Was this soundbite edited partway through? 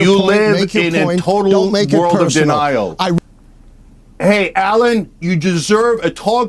yes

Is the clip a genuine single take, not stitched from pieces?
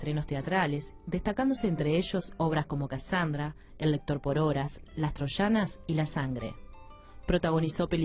no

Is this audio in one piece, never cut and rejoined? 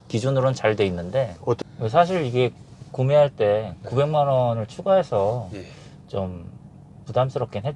no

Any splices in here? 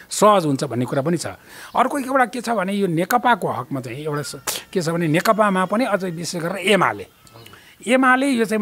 no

